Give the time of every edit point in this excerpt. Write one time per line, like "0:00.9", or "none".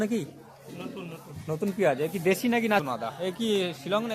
0:02.8